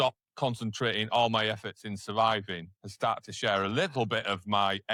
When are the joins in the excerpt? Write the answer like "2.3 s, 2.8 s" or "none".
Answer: none